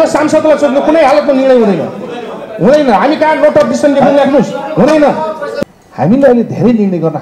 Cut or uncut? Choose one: cut